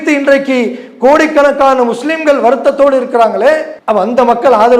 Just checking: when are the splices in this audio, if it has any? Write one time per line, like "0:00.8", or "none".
0:03.7